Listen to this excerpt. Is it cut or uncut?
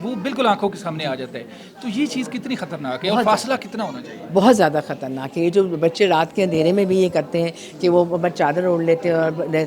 uncut